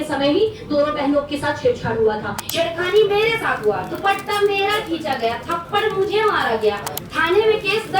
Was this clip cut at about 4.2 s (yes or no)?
no